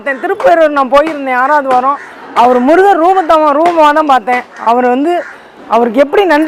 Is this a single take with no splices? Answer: yes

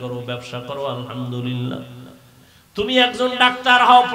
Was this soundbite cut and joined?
no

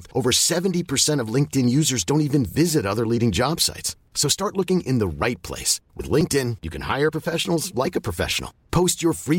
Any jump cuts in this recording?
no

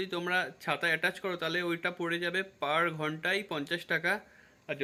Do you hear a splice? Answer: no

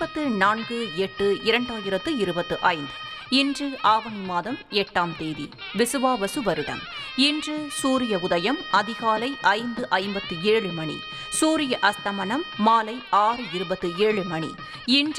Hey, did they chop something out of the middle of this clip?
no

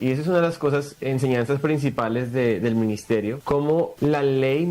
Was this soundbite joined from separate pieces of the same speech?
yes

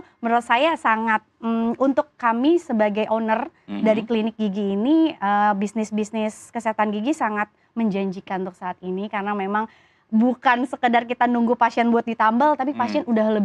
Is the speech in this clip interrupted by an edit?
no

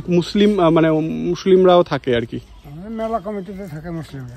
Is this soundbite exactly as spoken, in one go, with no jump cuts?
yes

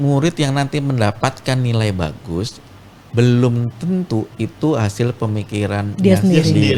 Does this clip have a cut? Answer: no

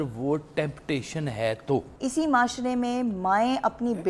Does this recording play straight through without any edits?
no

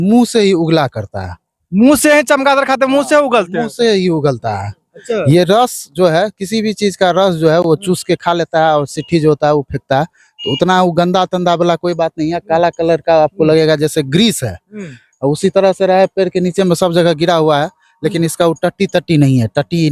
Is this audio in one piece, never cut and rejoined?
yes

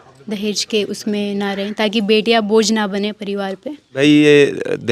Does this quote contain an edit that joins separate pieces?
yes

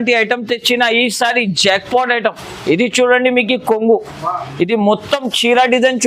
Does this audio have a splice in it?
no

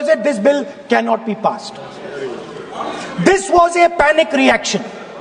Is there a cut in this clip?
no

